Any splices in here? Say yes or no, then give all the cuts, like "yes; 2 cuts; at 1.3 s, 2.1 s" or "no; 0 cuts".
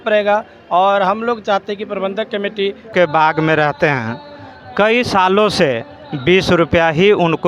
yes; 1 cut; at 2.9 s